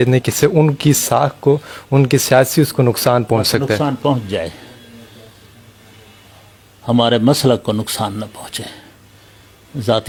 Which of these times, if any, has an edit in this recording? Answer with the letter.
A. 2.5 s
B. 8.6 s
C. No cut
C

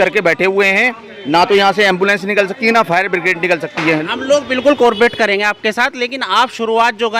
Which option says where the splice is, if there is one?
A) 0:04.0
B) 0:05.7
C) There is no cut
A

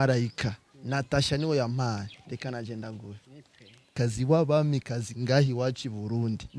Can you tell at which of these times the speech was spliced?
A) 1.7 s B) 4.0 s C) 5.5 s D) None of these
B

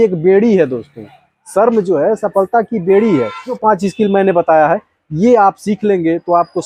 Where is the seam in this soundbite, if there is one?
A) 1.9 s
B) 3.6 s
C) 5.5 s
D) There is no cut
B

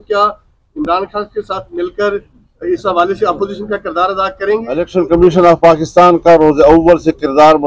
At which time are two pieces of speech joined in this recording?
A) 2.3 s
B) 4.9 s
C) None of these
B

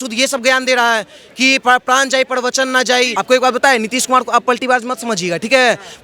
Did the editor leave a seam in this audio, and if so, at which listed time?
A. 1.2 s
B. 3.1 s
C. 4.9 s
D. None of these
B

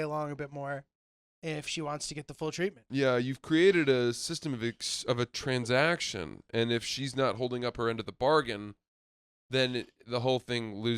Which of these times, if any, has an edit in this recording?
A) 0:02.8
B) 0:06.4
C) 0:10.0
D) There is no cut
A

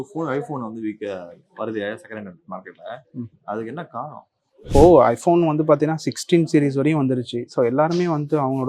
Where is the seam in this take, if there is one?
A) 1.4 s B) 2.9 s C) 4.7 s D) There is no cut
C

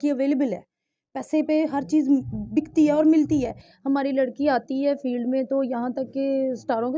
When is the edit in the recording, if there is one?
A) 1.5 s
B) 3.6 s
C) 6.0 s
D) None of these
B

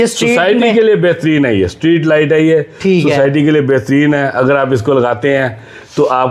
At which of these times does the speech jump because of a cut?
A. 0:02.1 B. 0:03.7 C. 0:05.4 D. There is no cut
D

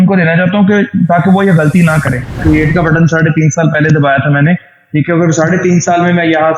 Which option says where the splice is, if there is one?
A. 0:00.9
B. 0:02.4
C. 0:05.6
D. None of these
B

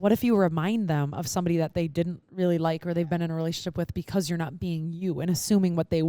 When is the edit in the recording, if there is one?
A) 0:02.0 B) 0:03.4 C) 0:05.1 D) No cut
D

